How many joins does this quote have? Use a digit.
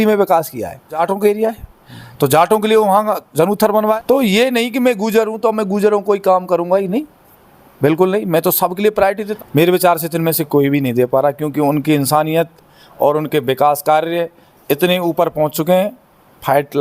3